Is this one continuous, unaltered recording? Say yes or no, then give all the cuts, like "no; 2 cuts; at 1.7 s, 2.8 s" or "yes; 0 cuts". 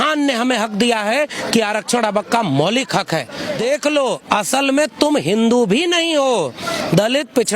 no; 1 cut; at 3.6 s